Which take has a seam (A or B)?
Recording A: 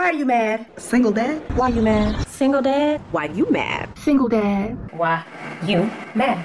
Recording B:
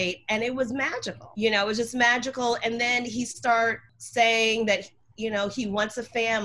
B